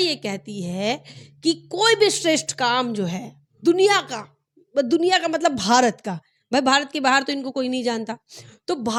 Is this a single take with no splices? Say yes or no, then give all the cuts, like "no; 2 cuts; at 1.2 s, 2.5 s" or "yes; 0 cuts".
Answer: yes; 0 cuts